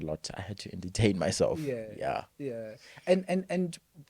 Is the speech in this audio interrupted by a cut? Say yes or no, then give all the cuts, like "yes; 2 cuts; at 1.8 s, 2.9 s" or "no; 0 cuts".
no; 0 cuts